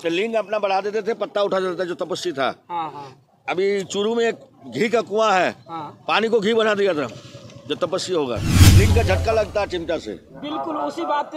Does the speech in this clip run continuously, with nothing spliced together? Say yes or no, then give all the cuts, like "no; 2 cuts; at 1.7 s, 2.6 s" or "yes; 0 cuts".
no; 1 cut; at 8.7 s